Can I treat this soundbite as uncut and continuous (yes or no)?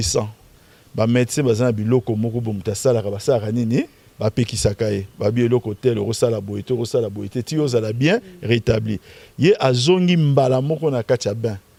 yes